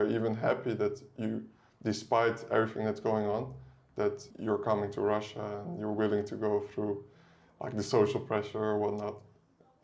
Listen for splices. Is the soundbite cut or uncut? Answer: cut